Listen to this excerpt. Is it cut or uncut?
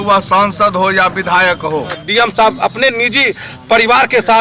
cut